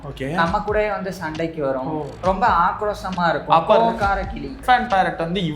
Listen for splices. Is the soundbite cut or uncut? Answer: cut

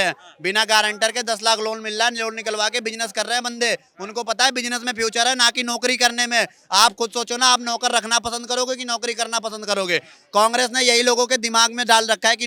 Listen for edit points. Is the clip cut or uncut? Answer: uncut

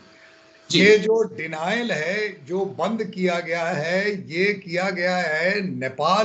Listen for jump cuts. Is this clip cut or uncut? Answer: uncut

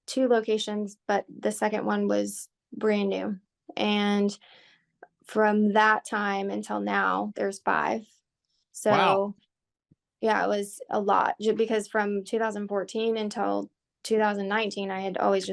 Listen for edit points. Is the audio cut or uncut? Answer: uncut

